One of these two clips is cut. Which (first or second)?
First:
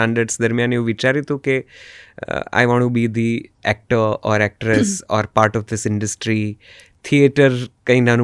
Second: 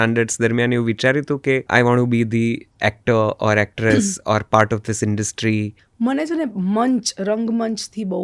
second